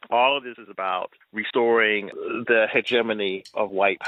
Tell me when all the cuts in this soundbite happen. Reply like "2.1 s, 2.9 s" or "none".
none

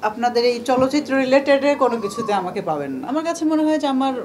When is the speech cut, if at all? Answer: 3.0 s

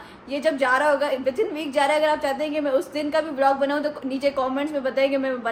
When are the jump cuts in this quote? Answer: none

